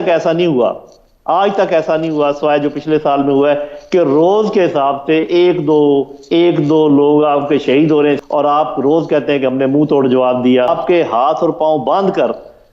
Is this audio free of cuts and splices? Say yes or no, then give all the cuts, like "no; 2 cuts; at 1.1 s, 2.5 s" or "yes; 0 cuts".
no; 2 cuts; at 8.2 s, 10.8 s